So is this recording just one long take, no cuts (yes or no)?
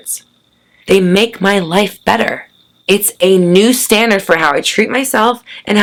yes